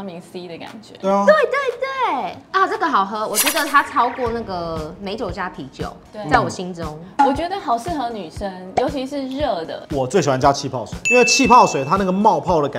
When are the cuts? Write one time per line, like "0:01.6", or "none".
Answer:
0:09.8

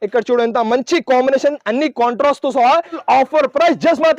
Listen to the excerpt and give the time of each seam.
0:01.6
0:03.0

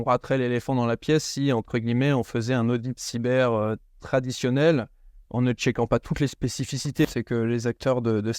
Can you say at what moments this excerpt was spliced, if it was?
0:07.0

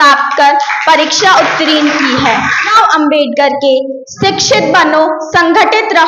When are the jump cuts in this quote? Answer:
0:02.7

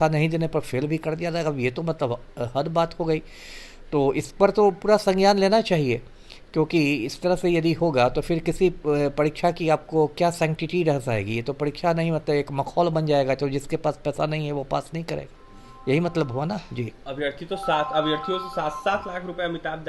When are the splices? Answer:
none

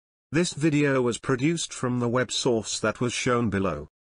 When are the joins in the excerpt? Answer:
none

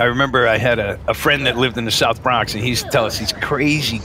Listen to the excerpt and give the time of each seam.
0:01.0

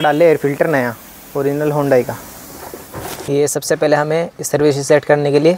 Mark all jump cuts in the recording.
0:03.2

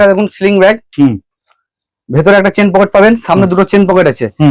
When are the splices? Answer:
none

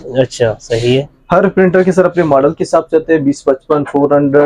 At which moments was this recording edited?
none

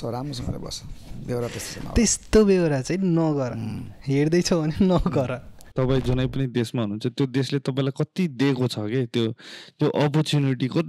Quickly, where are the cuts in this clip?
0:05.7

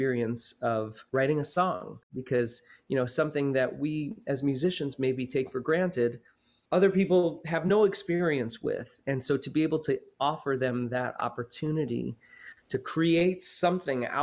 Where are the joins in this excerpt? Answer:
0:01.0
0:02.1

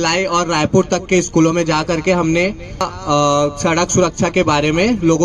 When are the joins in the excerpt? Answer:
0:02.9

